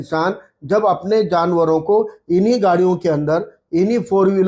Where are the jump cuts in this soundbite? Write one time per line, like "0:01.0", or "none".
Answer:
none